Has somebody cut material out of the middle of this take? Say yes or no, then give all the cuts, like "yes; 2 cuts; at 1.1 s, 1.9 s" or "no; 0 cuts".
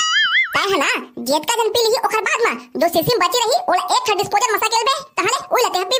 no; 0 cuts